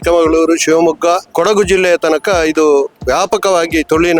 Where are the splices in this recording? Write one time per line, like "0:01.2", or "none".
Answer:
0:01.3
0:03.0